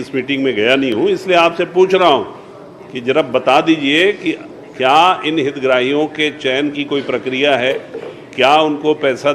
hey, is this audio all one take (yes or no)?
yes